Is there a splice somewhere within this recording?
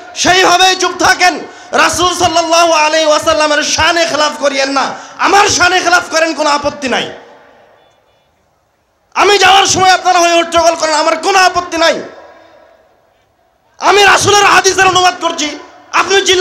no; 0 cuts

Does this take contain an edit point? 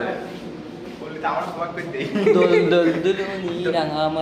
no; 0 cuts

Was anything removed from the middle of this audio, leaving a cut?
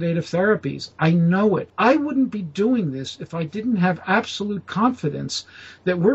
yes; 1 cut; at 1.7 s

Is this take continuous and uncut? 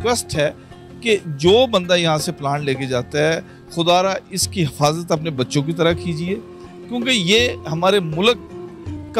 yes; 0 cuts

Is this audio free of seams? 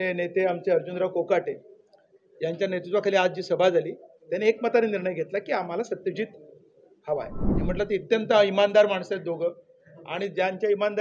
no; 1 cut; at 7.6 s

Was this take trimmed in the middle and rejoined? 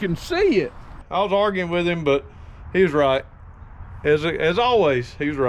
yes; 1 cut; at 1.0 s

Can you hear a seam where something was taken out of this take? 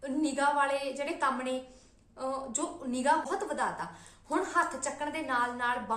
yes; 1 cut; at 3.3 s

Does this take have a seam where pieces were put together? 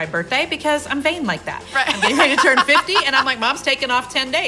no; 0 cuts

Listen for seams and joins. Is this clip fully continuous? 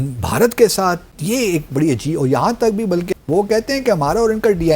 no; 1 cut; at 3.1 s

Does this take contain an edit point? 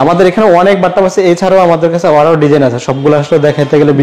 no; 0 cuts

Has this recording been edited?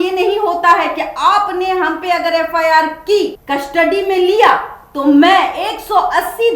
yes; 1 cut; at 3.4 s

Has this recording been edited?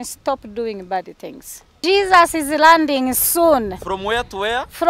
yes; 1 cut; at 1.8 s

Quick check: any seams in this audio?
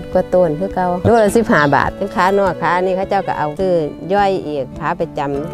yes; 3 cuts; at 1.0 s, 2.0 s, 3.5 s

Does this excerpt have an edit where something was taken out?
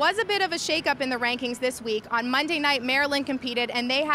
no; 0 cuts

